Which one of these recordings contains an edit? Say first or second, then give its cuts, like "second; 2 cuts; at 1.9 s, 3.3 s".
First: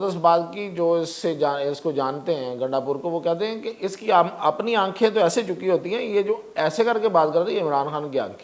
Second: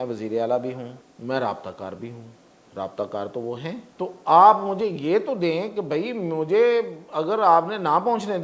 second; 2 cuts; at 1.0 s, 3.9 s